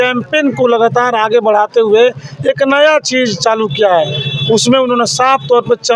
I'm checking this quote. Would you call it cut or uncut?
uncut